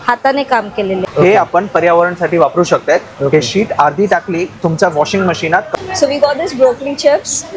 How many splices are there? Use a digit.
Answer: 2